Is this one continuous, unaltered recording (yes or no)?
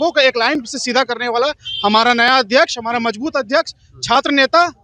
yes